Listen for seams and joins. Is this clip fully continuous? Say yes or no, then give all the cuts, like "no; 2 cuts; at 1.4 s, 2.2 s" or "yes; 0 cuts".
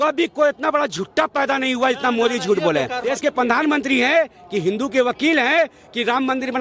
no; 1 cut; at 3.1 s